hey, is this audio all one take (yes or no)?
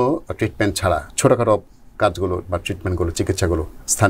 no